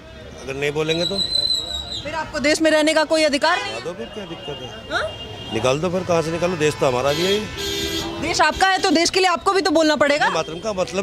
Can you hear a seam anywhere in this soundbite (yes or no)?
no